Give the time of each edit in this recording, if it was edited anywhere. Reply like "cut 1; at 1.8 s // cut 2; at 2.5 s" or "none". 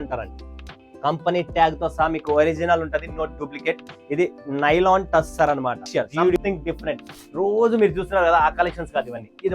cut 1; at 6.4 s